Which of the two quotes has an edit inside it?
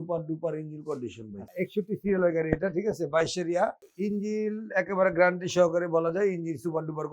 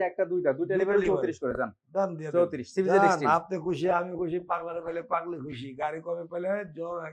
first; 1 cut; at 1.5 s

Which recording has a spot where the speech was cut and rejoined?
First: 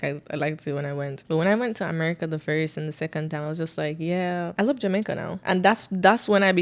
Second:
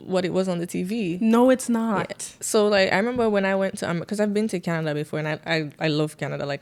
first; 3 cuts; at 1.2 s, 4.5 s, 5.3 s

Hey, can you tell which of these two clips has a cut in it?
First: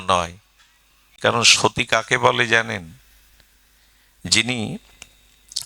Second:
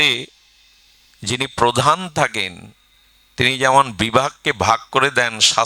first; 1 cut; at 1.1 s

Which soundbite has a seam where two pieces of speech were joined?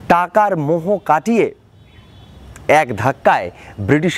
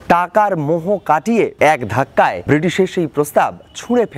second; 2 cuts; at 1.5 s, 2.4 s

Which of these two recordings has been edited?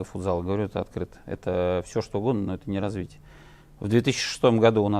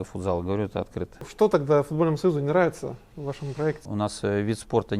second; 2 cuts; at 1.3 s, 3.9 s

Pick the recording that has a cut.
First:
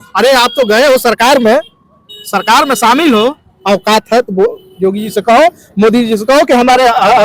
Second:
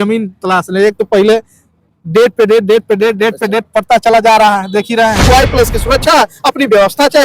second; 1 cut; at 5.3 s

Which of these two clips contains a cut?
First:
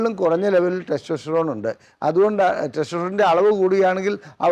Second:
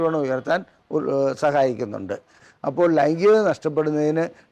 second; 1 cut; at 2.3 s

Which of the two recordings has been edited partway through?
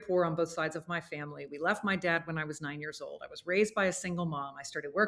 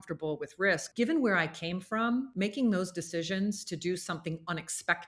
second; 2 cuts; at 0.9 s, 2.3 s

